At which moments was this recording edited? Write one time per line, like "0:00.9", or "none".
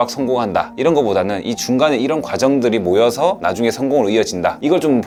none